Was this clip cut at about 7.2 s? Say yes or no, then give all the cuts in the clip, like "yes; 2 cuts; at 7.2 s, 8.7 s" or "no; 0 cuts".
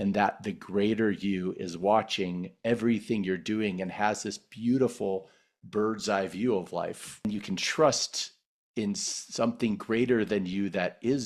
yes; 1 cut; at 7.2 s